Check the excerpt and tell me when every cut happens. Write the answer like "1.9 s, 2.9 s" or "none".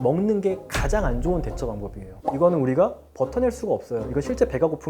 2.0 s